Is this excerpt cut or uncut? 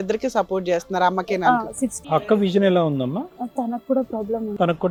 uncut